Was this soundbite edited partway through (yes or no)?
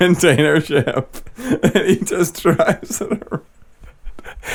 no